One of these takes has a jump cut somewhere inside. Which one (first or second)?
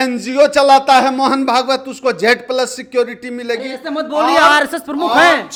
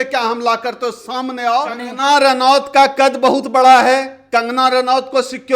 second